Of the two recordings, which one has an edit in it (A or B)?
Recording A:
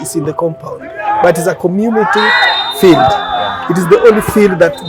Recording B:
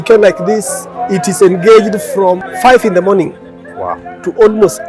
B